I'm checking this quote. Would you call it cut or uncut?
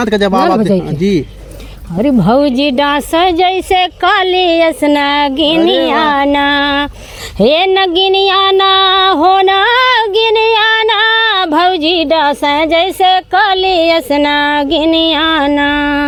uncut